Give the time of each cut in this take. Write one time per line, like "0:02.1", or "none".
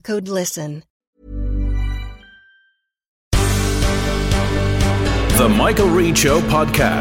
0:00.9
0:03.2